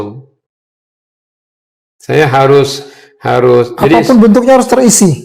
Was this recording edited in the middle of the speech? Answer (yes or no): no